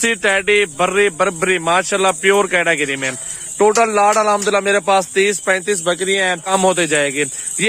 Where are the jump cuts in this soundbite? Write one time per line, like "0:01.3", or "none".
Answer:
0:06.5